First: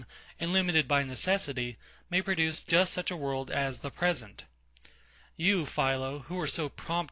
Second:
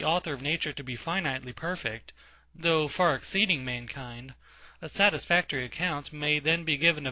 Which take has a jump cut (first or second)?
second